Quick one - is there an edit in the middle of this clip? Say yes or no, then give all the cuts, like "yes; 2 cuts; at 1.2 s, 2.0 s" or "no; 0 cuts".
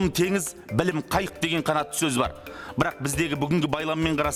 no; 0 cuts